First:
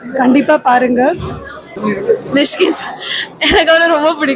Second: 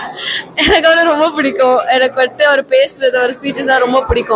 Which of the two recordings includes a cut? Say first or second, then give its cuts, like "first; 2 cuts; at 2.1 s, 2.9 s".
first; 1 cut; at 1.6 s